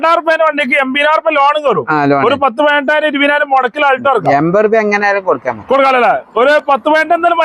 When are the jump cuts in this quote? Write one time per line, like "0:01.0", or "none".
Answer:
none